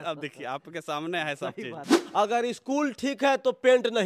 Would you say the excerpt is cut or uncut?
cut